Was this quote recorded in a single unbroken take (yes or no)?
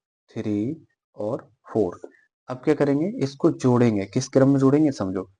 yes